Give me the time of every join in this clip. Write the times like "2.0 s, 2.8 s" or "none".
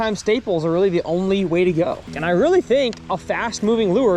2.1 s